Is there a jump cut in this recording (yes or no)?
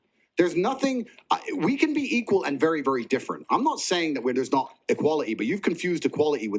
no